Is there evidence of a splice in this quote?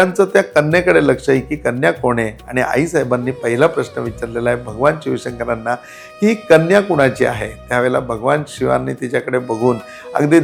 no; 0 cuts

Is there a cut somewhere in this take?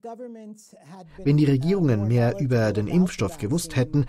yes; 1 cut; at 1.1 s

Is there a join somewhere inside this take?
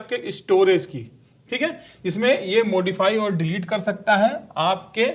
no; 0 cuts

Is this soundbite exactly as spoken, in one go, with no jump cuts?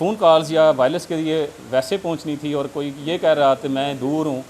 yes; 0 cuts

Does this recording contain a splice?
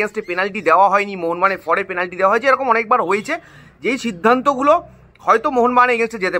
no; 0 cuts

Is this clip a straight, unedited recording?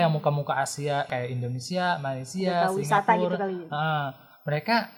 yes; 0 cuts

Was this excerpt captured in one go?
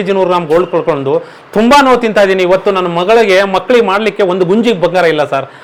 yes; 0 cuts

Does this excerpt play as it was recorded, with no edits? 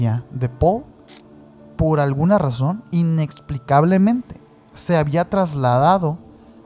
yes; 0 cuts

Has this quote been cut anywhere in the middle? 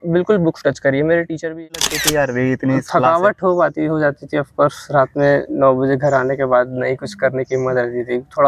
yes; 1 cut; at 1.5 s

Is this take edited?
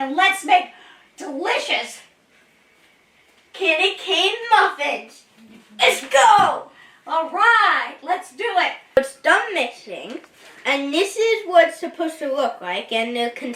yes; 1 cut; at 9.0 s

